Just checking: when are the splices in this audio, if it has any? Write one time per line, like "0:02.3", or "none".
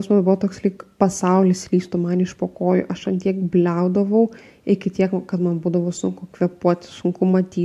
none

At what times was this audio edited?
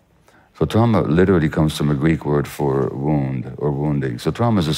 none

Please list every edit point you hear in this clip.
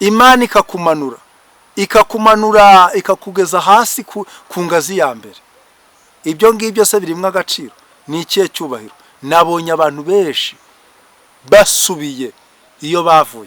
none

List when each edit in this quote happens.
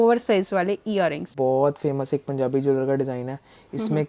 0:01.3

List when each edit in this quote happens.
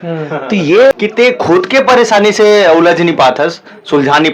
0:00.9

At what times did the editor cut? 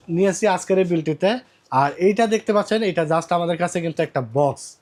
none

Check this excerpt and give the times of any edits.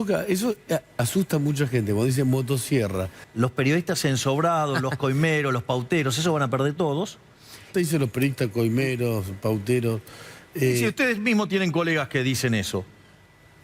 0:03.2
0:07.7

